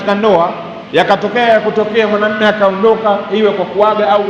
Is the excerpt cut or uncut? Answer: uncut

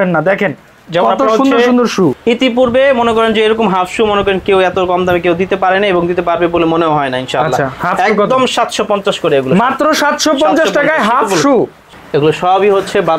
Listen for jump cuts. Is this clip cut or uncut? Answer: cut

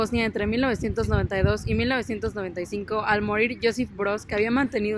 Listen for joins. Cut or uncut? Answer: uncut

